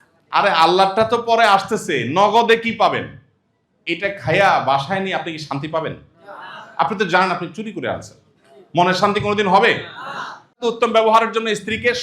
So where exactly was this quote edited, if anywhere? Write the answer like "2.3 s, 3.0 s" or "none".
10.6 s